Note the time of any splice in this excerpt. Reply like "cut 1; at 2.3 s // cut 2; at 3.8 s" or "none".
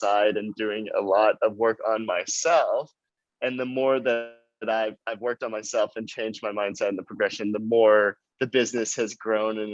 none